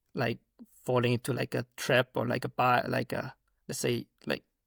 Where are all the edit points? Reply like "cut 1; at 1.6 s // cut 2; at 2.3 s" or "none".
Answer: none